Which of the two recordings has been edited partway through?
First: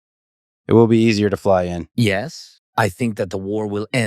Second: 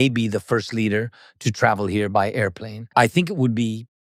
first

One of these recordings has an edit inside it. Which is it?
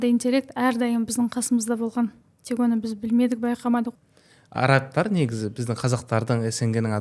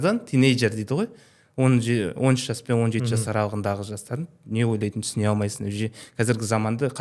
first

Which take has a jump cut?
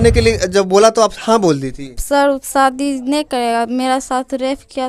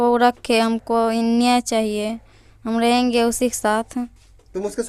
first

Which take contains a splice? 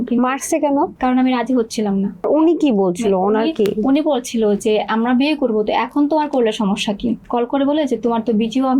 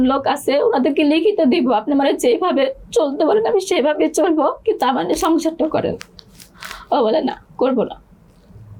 first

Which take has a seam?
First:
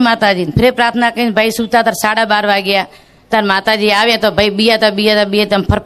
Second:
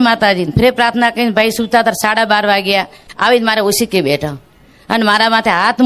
second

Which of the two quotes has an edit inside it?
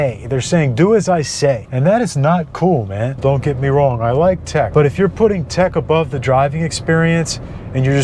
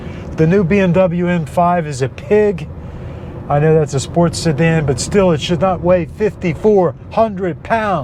first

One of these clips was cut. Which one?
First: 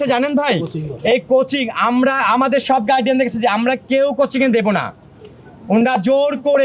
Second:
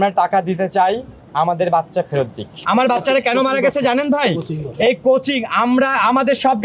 second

